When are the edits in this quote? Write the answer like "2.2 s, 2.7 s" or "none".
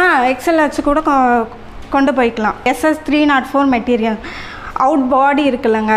2.7 s